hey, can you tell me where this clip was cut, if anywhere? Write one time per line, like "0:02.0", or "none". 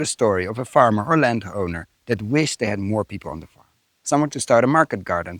none